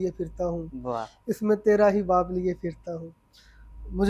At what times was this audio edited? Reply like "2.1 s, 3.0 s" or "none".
none